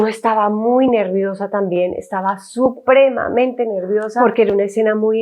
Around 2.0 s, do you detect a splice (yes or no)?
no